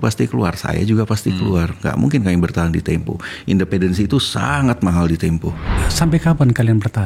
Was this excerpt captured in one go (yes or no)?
no